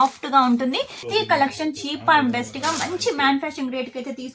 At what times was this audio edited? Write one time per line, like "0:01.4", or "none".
0:01.0

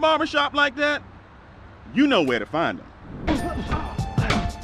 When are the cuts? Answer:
0:03.2

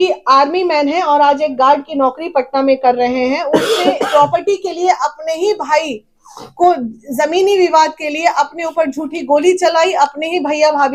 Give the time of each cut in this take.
none

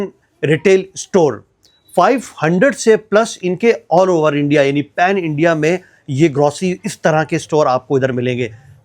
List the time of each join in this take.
none

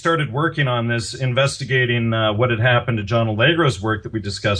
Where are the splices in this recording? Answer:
0:02.8

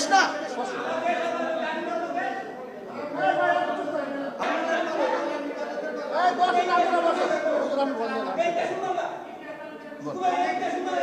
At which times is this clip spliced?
0:04.4

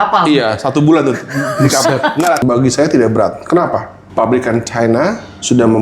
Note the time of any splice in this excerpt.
0:02.4

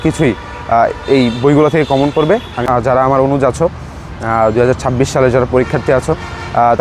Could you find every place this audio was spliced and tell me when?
0:02.7

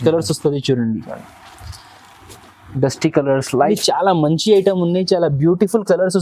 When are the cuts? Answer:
0:03.7

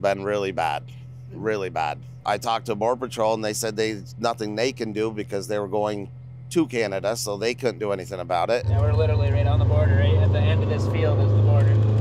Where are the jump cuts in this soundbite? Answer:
0:02.2
0:08.7

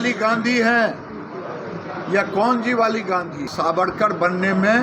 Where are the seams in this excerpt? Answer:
0:03.4

